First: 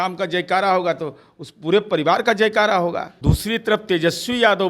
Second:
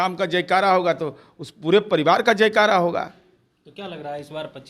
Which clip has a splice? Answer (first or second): first